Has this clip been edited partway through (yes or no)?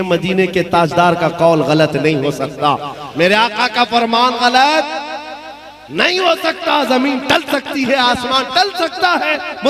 no